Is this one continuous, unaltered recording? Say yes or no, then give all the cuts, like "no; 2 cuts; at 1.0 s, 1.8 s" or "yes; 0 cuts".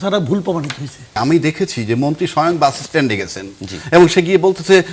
no; 1 cut; at 1.1 s